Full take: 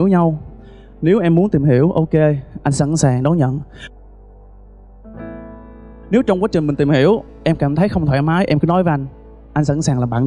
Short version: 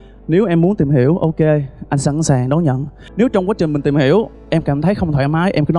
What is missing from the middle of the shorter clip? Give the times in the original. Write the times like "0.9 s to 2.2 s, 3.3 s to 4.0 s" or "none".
3.7 s to 5.9 s